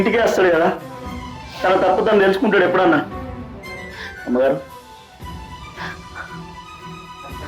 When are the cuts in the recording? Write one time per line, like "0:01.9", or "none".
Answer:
0:04.7

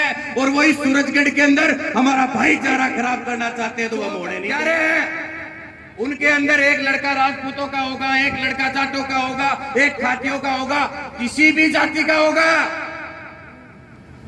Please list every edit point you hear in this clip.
0:04.3

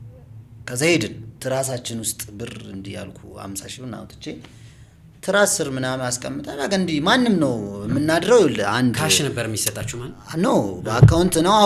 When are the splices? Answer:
0:01.3

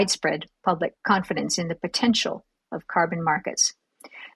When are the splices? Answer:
0:01.0

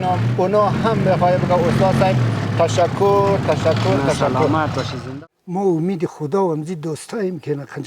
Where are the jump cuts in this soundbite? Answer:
0:05.0

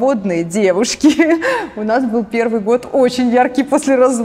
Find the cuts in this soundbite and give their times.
none

